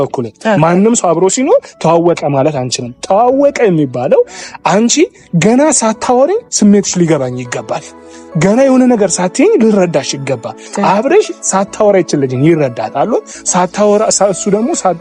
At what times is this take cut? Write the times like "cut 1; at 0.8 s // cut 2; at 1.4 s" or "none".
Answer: none